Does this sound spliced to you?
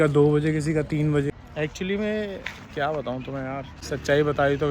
yes; 2 cuts; at 1.3 s, 3.7 s

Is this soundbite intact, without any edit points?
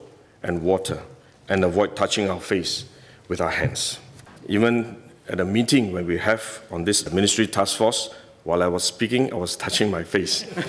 no; 1 cut; at 4.3 s

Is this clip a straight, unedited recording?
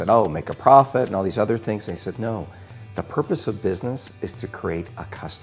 yes; 0 cuts

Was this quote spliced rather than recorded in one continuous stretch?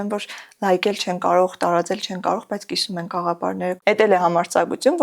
yes; 1 cut; at 3.8 s

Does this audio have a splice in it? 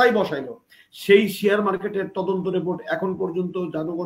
no; 0 cuts

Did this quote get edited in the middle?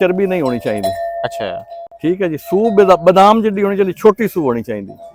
no; 0 cuts

